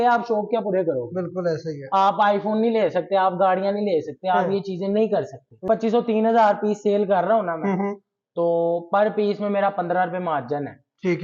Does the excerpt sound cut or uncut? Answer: cut